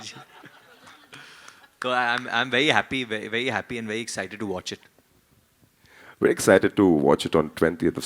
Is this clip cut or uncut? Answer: uncut